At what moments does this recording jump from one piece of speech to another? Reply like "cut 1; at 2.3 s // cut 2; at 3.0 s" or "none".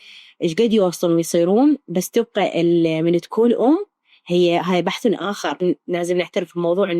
cut 1; at 5.6 s